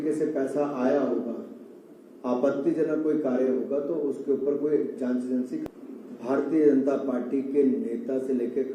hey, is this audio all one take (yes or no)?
no